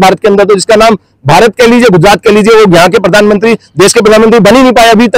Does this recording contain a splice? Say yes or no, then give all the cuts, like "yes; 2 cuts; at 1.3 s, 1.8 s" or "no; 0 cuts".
no; 0 cuts